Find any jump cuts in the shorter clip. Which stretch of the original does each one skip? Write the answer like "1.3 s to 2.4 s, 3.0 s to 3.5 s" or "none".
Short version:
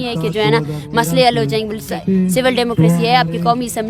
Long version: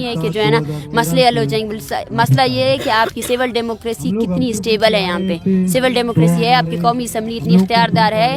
1.9 s to 5.3 s